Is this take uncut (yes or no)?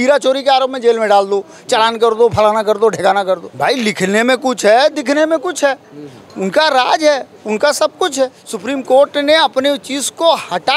no